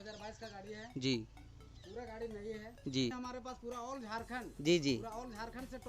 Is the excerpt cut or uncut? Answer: cut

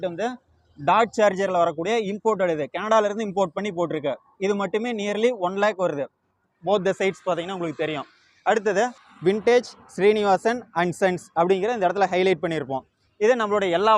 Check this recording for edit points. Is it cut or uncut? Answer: cut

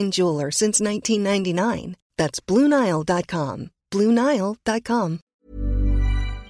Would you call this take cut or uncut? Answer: cut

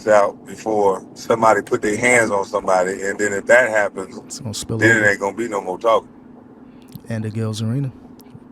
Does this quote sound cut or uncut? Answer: cut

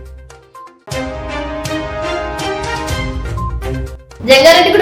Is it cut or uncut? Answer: cut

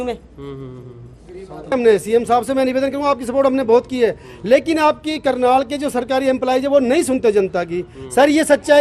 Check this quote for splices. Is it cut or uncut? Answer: cut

